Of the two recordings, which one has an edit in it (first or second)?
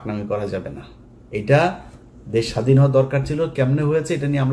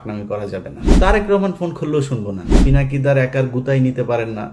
second